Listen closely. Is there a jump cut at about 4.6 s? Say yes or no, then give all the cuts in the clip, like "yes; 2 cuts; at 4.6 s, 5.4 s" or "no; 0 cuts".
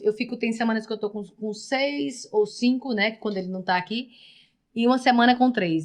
no; 0 cuts